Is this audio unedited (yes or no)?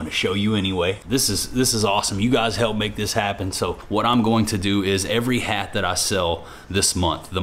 no